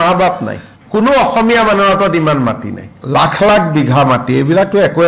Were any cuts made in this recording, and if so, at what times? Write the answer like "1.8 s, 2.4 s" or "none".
2.9 s